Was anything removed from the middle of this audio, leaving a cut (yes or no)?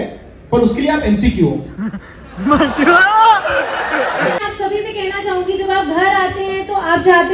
yes